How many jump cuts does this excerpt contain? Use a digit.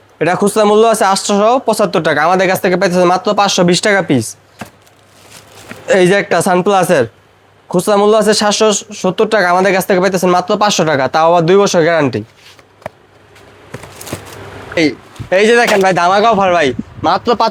0